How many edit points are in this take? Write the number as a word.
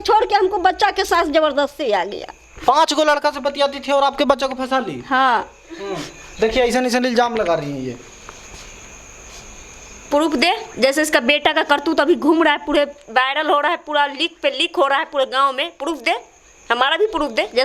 zero